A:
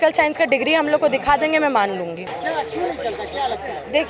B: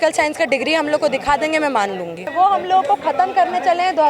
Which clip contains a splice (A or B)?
B